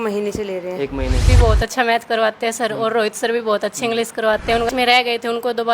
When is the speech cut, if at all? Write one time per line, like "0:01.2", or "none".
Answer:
0:01.3
0:04.7